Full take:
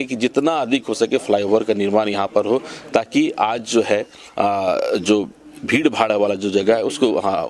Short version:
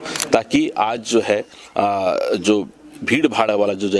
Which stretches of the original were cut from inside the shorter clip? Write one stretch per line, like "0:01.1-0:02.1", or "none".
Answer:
none